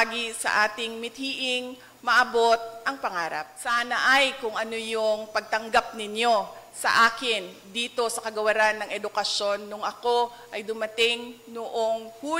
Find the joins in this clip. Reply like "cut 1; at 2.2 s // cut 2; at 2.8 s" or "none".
cut 1; at 3.5 s